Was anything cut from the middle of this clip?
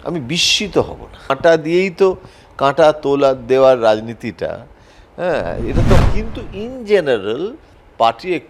yes; 2 cuts; at 1.3 s, 6.0 s

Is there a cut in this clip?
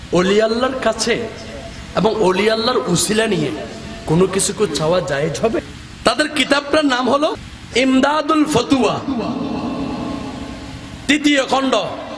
yes; 2 cuts; at 5.6 s, 7.5 s

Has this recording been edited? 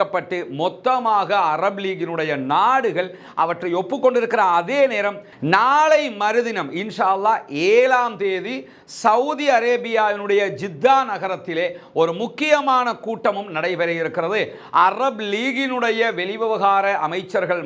no; 0 cuts

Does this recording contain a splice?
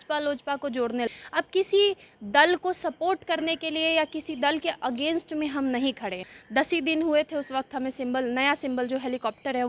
yes; 2 cuts; at 1.1 s, 6.3 s

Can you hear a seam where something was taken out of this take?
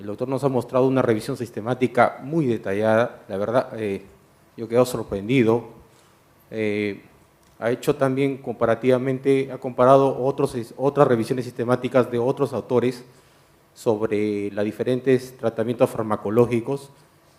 no; 0 cuts

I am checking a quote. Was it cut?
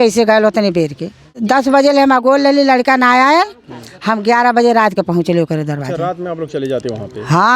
yes; 1 cut; at 1.3 s

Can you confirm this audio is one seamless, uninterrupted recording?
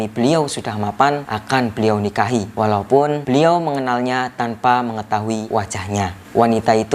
no; 4 cuts; at 1.3 s, 2.5 s, 3.2 s, 5.7 s

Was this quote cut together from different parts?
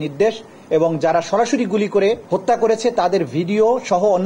yes; 1 cut; at 2.2 s

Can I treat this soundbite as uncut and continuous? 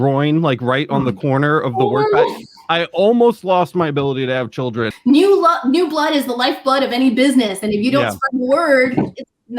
no; 1 cut; at 4.9 s

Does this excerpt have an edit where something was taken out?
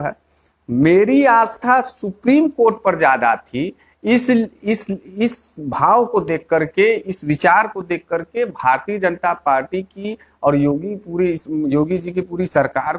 no; 0 cuts

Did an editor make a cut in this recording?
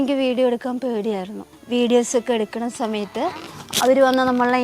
yes; 1 cut; at 1.5 s

